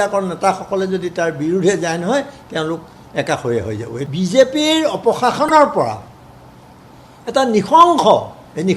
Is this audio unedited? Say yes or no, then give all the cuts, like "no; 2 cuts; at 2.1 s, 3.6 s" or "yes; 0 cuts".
no; 1 cut; at 4.1 s